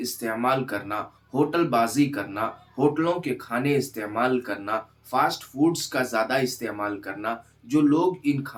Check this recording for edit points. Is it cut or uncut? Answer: uncut